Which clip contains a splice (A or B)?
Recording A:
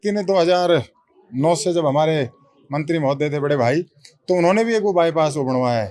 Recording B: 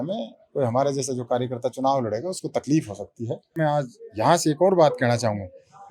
B